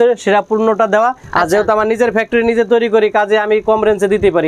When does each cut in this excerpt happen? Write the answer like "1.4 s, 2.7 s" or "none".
1.2 s